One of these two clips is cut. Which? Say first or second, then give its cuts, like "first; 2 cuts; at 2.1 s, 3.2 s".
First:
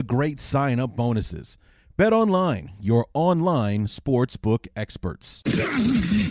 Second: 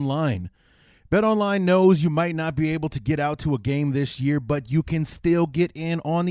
first; 1 cut; at 5.4 s